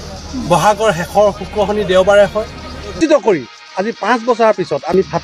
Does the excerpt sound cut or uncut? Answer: cut